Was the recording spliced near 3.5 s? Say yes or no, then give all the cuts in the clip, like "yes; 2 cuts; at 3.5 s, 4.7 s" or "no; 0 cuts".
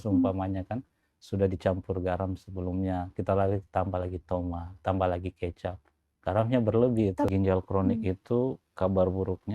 no; 1 cut; at 7.3 s